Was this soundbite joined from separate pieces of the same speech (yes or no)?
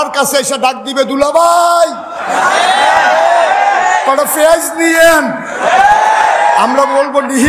no